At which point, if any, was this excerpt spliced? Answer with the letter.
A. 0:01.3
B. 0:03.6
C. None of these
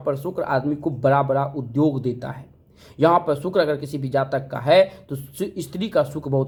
C